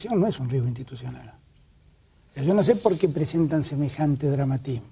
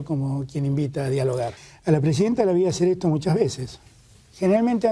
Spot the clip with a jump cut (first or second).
second